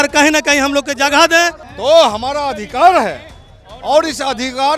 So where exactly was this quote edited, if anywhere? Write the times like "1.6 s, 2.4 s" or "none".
1.7 s

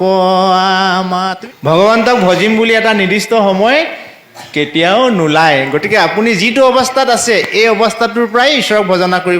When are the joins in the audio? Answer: 1.3 s

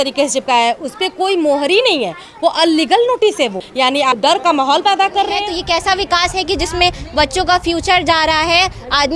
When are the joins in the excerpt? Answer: 4.2 s, 5.5 s

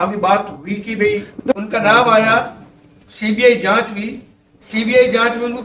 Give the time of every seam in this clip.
1.3 s

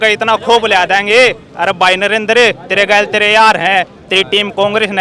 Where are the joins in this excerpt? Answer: none

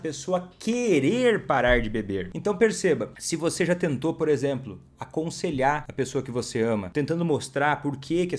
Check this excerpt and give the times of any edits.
2.3 s, 3.2 s, 5.9 s, 6.9 s

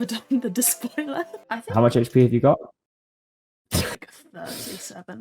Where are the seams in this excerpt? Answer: 1.4 s

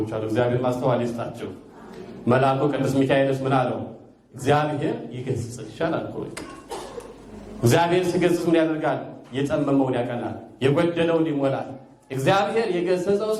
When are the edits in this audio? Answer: none

